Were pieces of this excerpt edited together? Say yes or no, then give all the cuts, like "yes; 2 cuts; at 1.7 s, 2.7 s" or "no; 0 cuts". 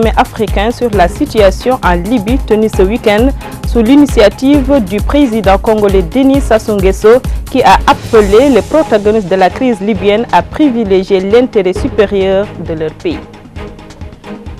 yes; 1 cut; at 13.2 s